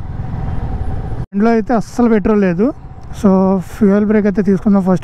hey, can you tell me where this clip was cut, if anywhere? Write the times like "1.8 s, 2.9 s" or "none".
none